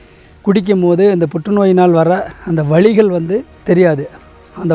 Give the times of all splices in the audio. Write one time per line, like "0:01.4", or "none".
0:03.6